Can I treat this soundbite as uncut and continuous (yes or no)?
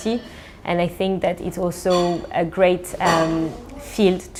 yes